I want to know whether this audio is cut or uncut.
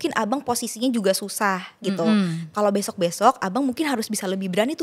cut